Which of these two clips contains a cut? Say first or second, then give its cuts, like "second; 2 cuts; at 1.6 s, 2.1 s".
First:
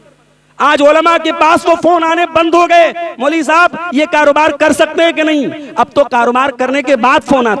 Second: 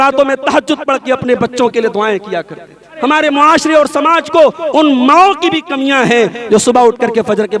second; 1 cut; at 2.9 s